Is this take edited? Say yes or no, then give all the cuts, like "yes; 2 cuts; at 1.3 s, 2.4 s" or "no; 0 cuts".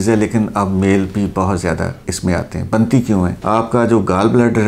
no; 0 cuts